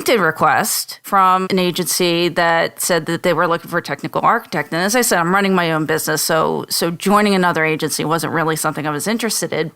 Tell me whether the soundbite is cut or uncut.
cut